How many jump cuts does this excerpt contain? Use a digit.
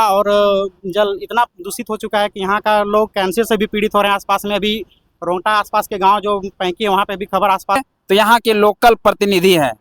1